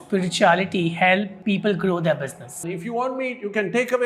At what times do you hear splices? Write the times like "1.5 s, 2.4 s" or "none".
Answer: 1.3 s, 2.6 s